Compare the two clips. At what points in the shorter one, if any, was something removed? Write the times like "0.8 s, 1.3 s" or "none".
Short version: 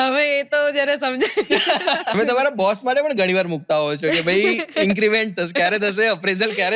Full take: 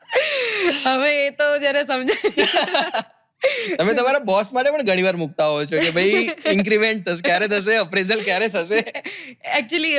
2.2 s